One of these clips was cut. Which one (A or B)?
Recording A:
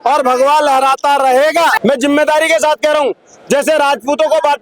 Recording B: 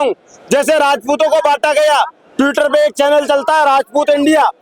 A